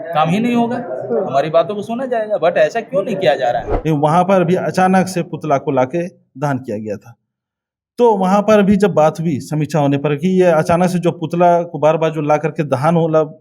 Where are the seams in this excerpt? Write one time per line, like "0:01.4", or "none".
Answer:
0:03.7